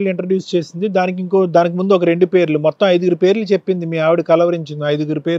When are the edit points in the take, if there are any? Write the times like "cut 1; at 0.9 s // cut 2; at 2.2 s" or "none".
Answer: none